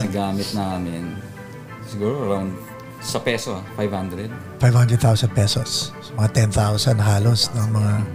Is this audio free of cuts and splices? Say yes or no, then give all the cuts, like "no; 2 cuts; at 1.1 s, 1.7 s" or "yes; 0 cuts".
yes; 0 cuts